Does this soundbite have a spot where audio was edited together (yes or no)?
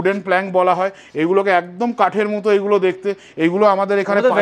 no